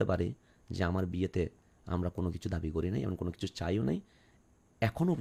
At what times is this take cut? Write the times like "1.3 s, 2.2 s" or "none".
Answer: none

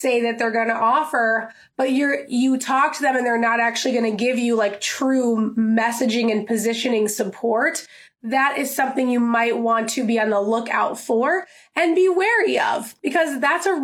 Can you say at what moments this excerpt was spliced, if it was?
12.9 s

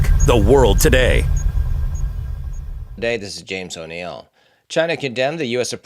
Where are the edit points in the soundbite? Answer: 3.0 s

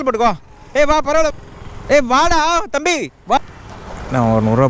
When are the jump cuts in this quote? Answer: 1.3 s, 3.4 s

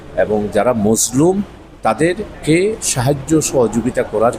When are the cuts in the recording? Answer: 2.3 s

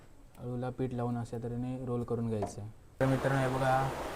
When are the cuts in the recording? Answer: 3.0 s

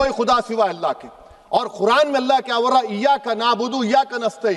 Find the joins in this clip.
none

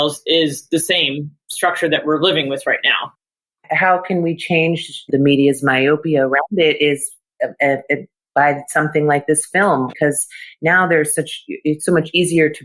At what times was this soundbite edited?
3.4 s, 5.1 s, 9.9 s

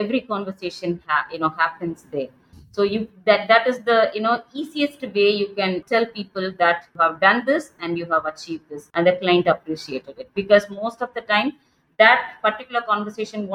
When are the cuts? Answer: 5.8 s, 6.9 s, 8.8 s

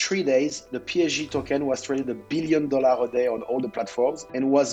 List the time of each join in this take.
none

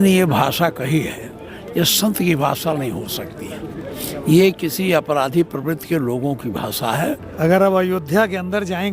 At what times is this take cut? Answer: 7.3 s

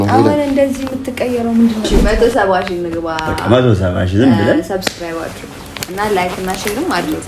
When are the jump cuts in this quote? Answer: 2.0 s

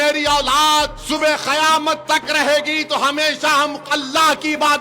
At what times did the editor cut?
1.0 s

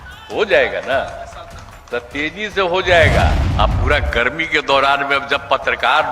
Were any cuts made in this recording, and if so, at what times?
3.4 s

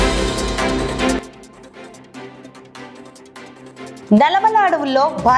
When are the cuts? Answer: 4.0 s

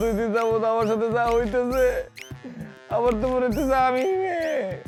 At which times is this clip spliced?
none

